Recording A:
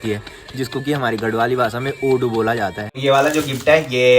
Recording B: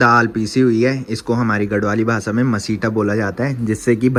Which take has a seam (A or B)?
A